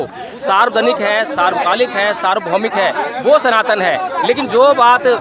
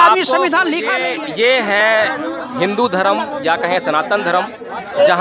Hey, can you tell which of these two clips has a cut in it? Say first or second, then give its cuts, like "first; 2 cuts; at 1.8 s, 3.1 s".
second; 1 cut; at 1.0 s